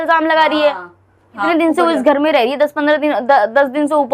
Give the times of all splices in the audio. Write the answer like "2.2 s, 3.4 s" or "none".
1.4 s